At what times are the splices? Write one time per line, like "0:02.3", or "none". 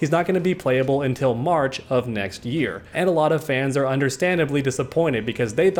none